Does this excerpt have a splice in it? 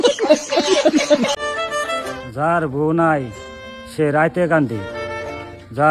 yes; 1 cut; at 1.1 s

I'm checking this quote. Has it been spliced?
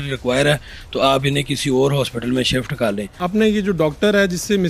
yes; 1 cut; at 3.2 s

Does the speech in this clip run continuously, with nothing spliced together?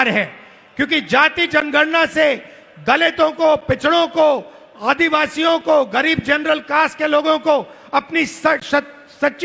yes; 0 cuts

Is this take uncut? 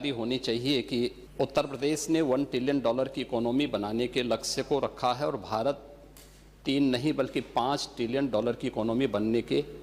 no; 1 cut; at 1.2 s

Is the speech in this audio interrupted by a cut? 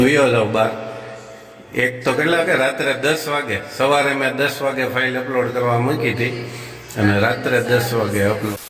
no; 0 cuts

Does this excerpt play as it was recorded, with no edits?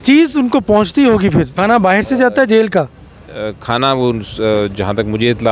no; 1 cut; at 1.5 s

